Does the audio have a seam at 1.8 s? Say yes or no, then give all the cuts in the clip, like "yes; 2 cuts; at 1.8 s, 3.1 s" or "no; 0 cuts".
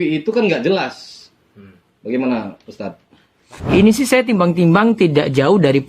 no; 1 cut; at 3.5 s